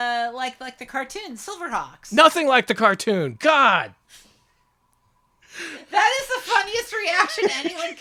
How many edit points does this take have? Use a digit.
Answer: 1